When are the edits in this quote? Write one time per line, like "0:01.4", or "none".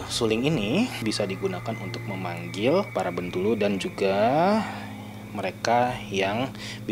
0:01.0
0:02.9